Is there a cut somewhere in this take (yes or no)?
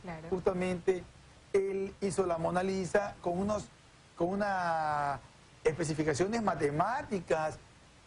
no